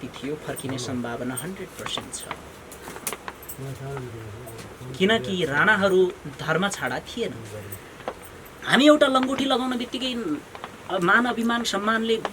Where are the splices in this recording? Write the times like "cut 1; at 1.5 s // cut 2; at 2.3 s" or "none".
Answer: cut 1; at 8.6 s